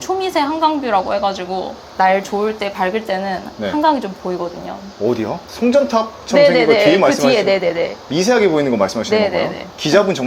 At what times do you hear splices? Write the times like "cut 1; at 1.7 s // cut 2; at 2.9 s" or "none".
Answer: cut 1; at 1.8 s